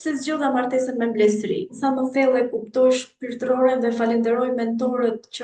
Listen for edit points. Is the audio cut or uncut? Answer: cut